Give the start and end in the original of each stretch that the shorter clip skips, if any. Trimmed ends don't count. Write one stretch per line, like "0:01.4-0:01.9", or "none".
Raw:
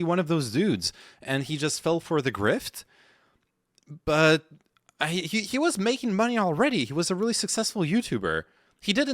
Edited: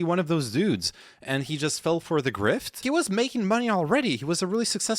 0:02.8-0:05.5